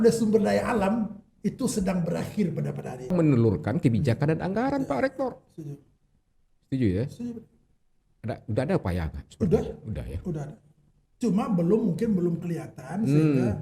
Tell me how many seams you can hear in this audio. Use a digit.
1